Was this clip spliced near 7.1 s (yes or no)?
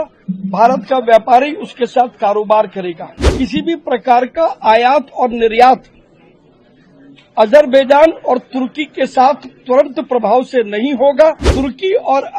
no